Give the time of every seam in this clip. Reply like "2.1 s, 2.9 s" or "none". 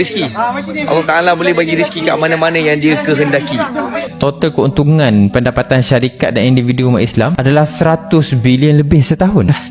4.1 s